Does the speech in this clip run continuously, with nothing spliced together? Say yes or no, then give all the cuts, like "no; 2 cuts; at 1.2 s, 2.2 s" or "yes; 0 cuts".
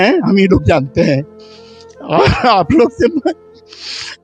yes; 0 cuts